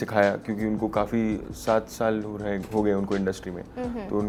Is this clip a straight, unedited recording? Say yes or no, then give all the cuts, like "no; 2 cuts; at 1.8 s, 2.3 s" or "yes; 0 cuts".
yes; 0 cuts